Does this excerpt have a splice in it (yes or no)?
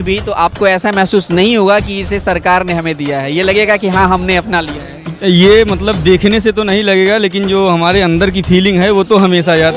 no